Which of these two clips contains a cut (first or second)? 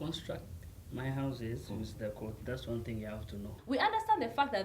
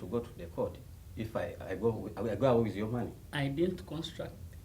first